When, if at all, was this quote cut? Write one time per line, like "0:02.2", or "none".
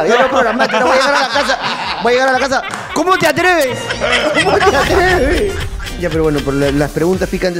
0:05.7